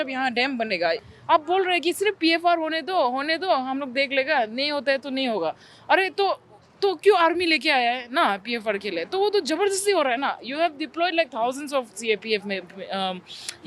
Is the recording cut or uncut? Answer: cut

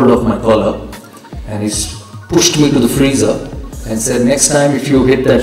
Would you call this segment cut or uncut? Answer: uncut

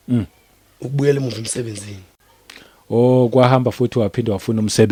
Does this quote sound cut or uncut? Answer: uncut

